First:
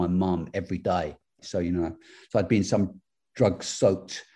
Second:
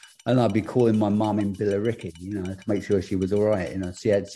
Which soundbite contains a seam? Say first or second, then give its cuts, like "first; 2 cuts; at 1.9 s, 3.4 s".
first; 1 cut; at 1.4 s